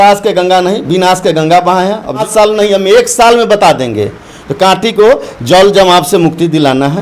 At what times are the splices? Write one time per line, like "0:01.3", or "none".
0:02.2